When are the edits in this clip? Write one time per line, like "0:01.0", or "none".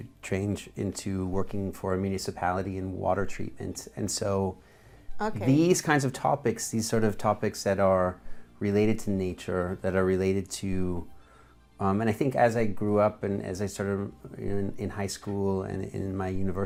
none